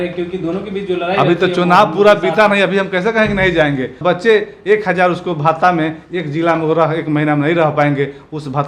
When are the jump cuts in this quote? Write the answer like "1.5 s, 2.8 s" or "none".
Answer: 4.0 s